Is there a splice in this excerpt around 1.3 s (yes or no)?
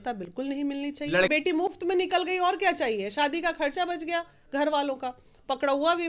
yes